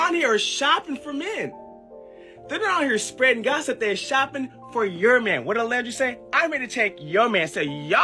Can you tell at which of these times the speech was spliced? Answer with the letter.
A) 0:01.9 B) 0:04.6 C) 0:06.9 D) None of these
D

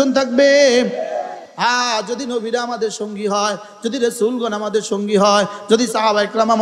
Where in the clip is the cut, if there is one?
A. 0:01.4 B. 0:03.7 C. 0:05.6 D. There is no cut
A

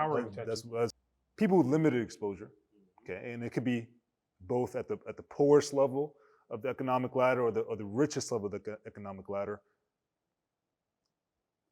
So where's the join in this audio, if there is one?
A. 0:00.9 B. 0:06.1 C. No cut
A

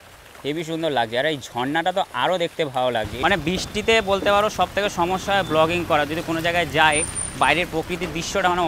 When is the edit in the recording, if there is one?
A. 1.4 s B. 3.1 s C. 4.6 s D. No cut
B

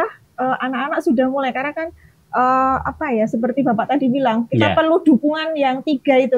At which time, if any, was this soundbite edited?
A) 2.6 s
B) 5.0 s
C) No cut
C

